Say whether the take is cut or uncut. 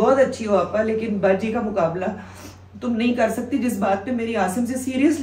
uncut